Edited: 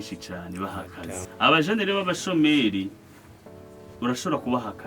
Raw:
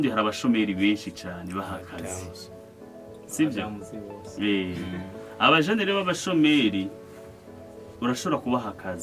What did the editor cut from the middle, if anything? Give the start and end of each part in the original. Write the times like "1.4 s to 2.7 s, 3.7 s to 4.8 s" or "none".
2.2 s to 5.2 s